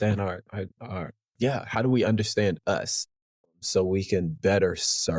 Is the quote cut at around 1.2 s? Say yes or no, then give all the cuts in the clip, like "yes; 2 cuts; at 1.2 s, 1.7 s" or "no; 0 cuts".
no; 1 cut; at 3.3 s